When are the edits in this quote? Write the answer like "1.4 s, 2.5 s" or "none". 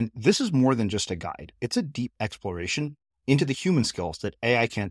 none